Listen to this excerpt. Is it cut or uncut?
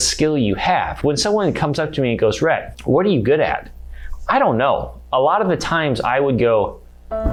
uncut